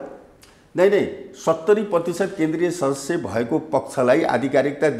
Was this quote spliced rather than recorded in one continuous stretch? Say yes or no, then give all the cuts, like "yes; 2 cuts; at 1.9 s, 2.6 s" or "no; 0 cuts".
no; 0 cuts